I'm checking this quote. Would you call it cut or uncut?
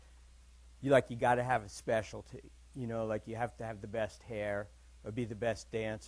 uncut